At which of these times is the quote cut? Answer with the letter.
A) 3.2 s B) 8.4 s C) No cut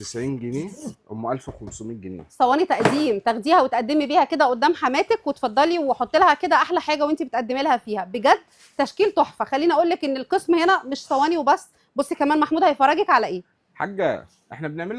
C